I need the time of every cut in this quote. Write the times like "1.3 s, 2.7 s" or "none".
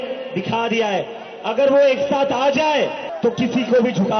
3.0 s